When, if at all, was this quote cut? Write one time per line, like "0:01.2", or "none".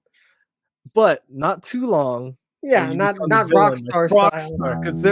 none